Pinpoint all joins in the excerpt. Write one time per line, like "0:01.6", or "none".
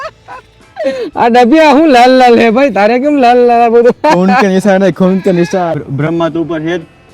0:05.8